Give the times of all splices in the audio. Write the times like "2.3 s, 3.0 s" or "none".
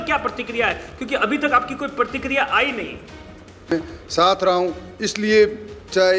3.7 s